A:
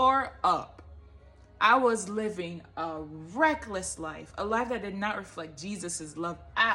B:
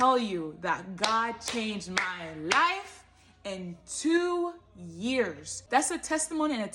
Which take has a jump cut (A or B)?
B